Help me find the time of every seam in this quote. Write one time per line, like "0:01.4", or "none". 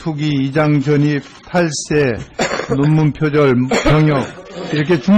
0:01.1